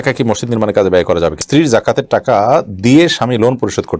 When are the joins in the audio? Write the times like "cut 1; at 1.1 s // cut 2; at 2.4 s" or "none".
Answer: cut 1; at 1.4 s